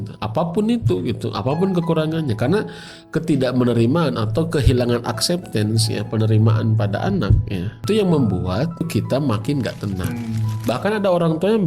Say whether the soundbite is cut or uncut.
cut